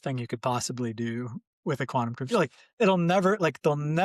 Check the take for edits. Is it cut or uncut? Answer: uncut